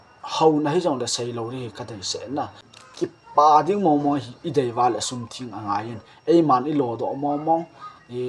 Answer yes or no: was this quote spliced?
yes